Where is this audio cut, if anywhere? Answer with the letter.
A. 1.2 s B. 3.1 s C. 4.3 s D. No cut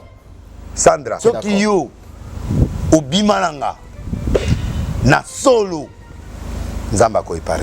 A